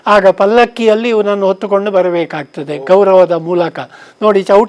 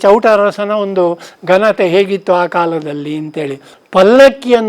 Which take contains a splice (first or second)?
second